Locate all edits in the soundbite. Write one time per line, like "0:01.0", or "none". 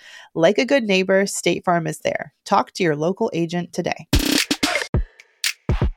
0:04.9